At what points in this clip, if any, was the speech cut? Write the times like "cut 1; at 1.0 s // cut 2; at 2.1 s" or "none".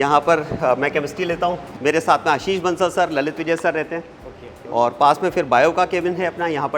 cut 1; at 1.7 s